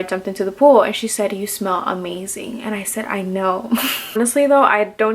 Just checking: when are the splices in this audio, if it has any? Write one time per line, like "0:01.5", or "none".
0:04.0